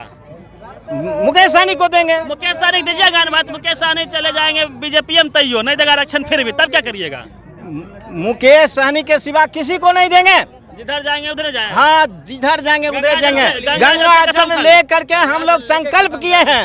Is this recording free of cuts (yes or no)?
yes